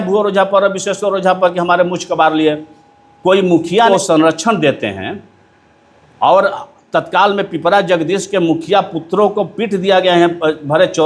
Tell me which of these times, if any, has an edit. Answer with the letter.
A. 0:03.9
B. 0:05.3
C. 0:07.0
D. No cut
A